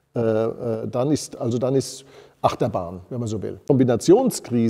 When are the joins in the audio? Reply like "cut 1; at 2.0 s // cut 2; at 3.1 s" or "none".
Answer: cut 1; at 3.6 s